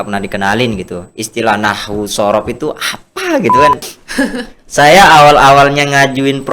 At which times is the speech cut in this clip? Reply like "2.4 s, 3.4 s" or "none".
3.9 s